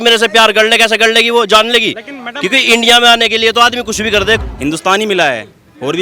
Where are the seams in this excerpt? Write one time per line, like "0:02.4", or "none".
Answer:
0:04.4